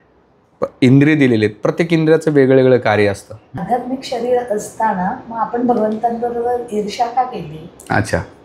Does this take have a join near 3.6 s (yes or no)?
yes